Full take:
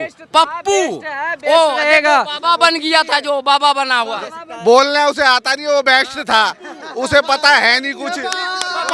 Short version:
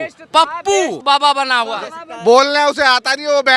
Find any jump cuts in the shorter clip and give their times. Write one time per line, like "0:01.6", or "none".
0:01.0